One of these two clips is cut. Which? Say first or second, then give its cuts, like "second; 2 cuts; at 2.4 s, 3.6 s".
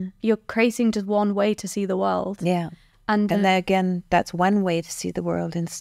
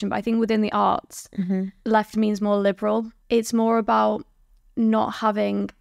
second; 2 cuts; at 1.7 s, 3.1 s